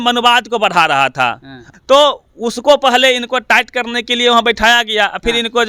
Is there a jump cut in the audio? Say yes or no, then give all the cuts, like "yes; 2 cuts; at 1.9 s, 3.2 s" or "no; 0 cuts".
no; 0 cuts